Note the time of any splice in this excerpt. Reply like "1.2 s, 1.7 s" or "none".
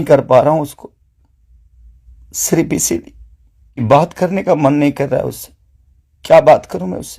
3.8 s